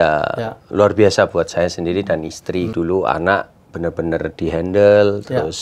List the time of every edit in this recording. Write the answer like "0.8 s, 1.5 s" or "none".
2.7 s